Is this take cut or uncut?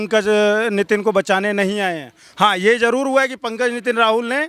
uncut